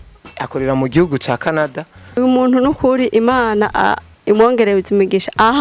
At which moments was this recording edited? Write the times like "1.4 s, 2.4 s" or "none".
2.2 s